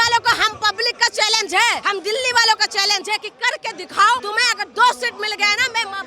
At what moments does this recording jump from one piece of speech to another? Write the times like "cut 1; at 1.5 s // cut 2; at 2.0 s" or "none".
cut 1; at 1.8 s // cut 2; at 4.2 s